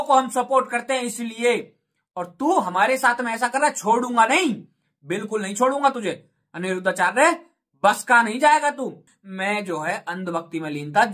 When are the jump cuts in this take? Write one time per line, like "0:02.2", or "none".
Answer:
0:09.1